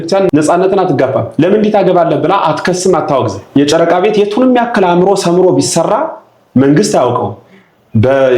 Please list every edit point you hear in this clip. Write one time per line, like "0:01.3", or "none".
0:03.4